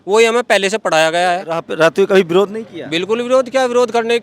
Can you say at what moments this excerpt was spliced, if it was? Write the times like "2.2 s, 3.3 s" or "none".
1.7 s